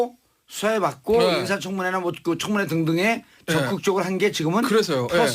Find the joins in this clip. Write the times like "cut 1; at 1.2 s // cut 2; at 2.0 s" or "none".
cut 1; at 3.6 s